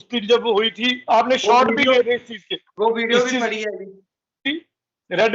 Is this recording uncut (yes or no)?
no